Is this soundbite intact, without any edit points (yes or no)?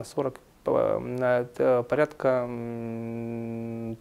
yes